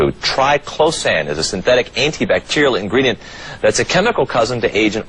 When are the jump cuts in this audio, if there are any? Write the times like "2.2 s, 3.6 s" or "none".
1.6 s